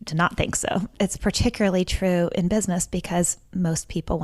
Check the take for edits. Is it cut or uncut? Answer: cut